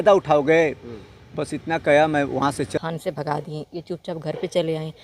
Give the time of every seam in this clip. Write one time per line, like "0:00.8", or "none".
0:02.8